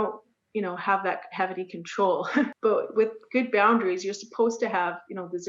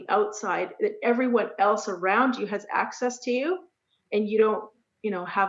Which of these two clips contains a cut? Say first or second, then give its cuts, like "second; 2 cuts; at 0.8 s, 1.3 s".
first; 1 cut; at 2.5 s